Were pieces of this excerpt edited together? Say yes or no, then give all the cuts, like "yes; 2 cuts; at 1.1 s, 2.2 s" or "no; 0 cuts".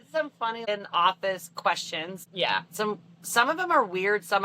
yes; 2 cuts; at 0.7 s, 2.2 s